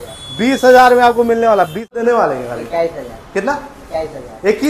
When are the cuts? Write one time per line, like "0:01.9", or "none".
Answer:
0:01.9